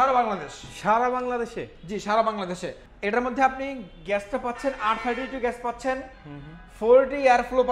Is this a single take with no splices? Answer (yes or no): yes